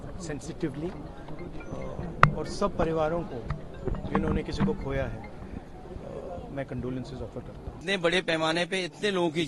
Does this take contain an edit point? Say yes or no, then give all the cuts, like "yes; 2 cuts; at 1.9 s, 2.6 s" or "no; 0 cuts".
yes; 1 cut; at 7.8 s